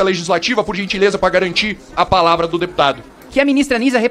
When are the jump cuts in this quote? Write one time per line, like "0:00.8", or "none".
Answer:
0:03.1